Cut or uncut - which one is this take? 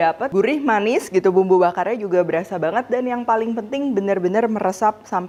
uncut